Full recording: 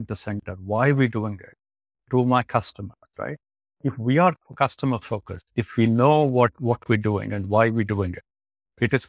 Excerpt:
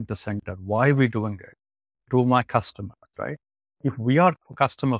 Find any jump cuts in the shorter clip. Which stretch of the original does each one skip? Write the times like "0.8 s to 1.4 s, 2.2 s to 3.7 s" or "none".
none